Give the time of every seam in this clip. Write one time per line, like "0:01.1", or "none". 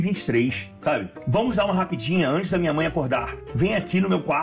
0:01.1
0:03.4